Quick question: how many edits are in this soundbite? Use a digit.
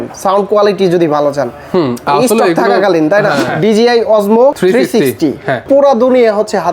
1